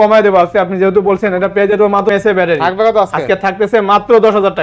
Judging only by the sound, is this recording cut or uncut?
cut